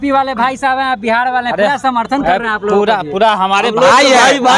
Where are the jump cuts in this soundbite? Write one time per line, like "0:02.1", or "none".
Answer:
none